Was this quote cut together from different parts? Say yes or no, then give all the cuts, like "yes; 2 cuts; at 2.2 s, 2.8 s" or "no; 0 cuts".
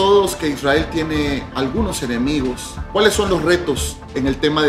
yes; 1 cut; at 2.7 s